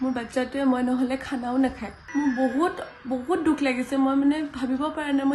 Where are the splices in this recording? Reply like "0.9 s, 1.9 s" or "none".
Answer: 1.9 s